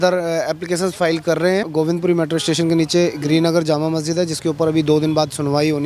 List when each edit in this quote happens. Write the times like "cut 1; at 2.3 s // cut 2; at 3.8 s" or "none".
cut 1; at 1.7 s

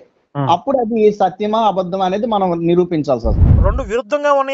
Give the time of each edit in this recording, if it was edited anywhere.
cut 1; at 3.4 s

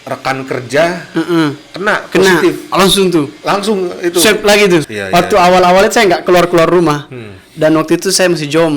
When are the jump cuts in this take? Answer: cut 1; at 4.8 s

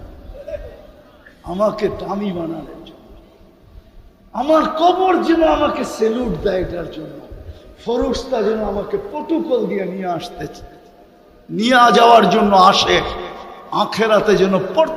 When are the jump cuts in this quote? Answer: none

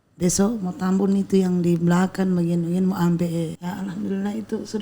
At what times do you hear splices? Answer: cut 1; at 3.6 s

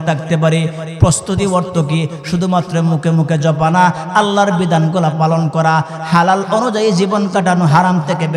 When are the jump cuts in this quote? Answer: none

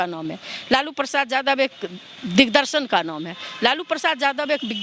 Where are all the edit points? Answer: none

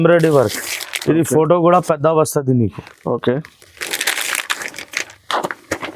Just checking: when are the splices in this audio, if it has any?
none

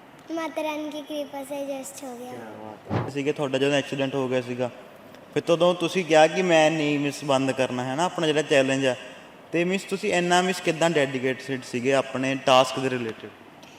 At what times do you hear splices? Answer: cut 1; at 3.1 s

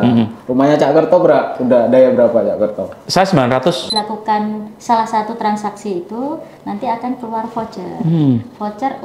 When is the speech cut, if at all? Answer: cut 1; at 3.9 s

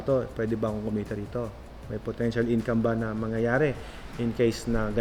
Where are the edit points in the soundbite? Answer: none

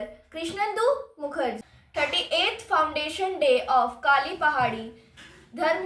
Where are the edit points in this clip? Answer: cut 1; at 1.6 s

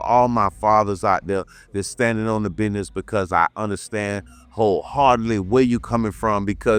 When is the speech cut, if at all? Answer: none

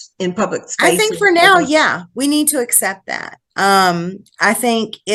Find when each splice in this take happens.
none

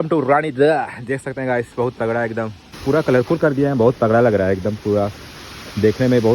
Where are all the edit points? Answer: cut 1; at 2.6 s

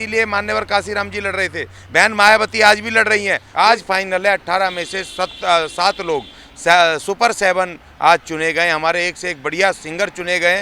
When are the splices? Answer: cut 1; at 3.4 s

